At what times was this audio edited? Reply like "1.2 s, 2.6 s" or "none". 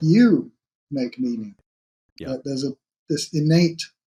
none